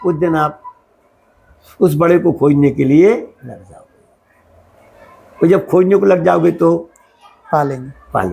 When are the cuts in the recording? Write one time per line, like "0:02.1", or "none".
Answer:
none